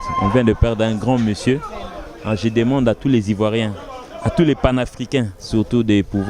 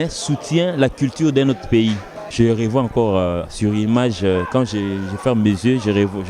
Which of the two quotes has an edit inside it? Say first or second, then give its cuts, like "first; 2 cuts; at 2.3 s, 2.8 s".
second; 1 cut; at 2.3 s